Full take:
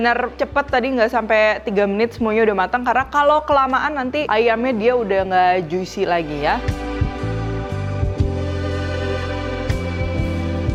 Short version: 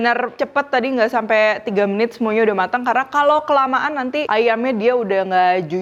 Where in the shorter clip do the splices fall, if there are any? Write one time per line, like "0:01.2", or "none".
none